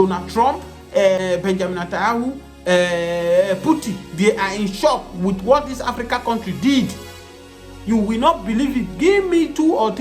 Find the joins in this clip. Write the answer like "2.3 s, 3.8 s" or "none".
1.2 s